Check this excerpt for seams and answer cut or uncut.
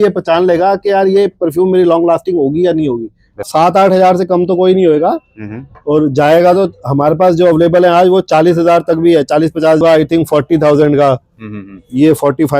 cut